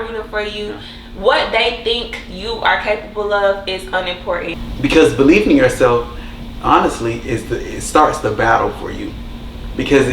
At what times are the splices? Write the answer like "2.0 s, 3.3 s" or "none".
4.6 s